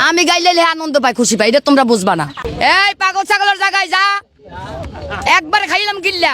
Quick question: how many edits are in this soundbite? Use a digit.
1